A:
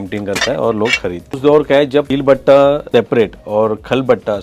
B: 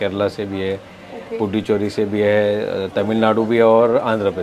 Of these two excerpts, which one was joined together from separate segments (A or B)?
A